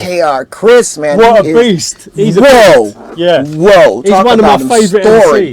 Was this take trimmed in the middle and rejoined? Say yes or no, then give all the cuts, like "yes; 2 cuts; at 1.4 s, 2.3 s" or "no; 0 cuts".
no; 0 cuts